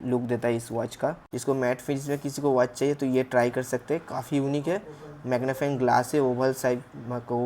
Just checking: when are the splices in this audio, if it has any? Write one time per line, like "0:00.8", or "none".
0:01.2